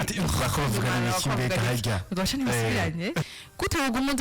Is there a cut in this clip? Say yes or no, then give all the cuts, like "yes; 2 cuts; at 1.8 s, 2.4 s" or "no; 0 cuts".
yes; 1 cut; at 3.3 s